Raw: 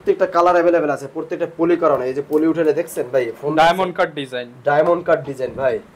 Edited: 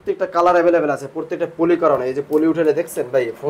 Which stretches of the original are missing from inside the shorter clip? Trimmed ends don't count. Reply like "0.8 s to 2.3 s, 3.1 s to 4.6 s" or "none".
none